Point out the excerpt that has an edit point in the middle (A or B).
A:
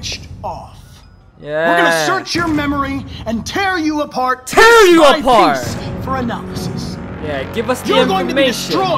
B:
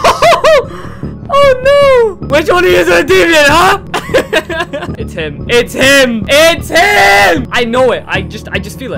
B